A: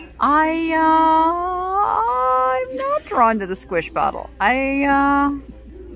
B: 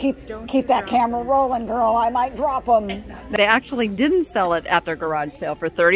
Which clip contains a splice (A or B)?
B